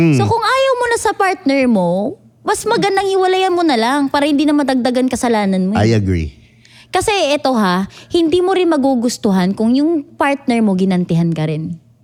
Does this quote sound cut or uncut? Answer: uncut